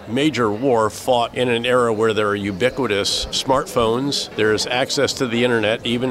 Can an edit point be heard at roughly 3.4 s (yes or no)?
yes